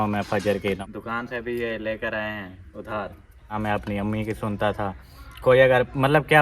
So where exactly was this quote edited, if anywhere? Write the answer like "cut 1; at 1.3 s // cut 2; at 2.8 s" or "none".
cut 1; at 0.8 s // cut 2; at 3.6 s